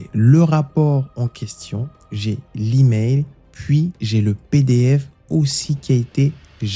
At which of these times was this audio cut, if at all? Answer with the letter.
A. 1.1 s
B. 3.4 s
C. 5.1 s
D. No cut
D